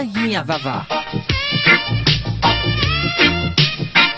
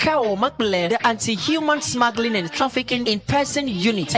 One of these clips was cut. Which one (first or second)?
first